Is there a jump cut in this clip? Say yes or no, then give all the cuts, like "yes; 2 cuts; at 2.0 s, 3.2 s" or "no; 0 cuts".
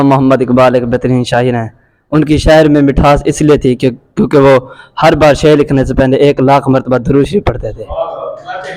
no; 0 cuts